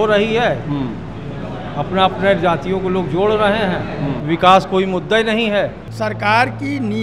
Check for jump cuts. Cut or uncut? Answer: cut